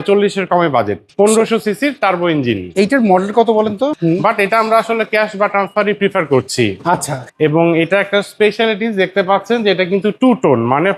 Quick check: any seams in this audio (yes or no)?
yes